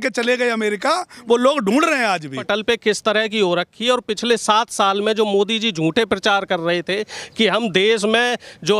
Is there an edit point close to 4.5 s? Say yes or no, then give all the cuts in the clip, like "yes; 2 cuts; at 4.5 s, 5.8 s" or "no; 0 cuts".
no; 1 cut; at 2.4 s